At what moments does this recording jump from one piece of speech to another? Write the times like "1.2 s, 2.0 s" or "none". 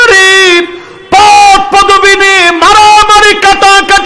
none